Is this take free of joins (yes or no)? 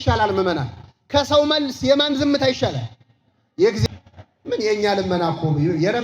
no